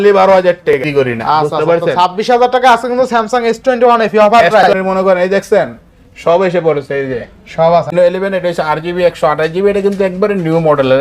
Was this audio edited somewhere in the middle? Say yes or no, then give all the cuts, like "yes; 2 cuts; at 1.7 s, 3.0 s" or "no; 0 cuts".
yes; 3 cuts; at 0.8 s, 4.6 s, 7.9 s